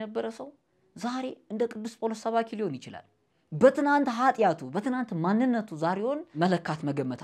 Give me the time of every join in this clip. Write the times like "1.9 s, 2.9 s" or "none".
6.4 s